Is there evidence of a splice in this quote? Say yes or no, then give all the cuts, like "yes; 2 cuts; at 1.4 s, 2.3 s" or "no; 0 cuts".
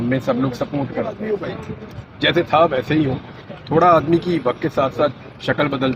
yes; 1 cut; at 1.2 s